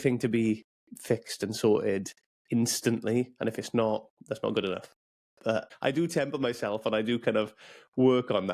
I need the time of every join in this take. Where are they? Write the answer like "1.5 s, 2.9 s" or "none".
5.7 s